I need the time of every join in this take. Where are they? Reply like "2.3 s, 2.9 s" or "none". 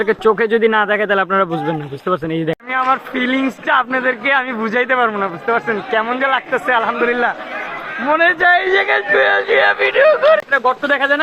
2.6 s, 10.4 s